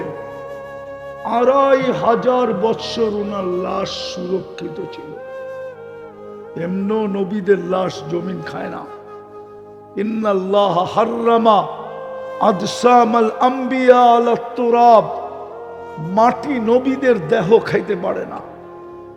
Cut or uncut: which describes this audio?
cut